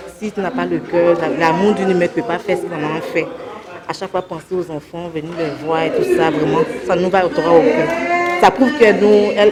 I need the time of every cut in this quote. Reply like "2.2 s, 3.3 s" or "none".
none